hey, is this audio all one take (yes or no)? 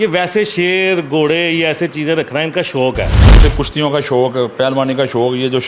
no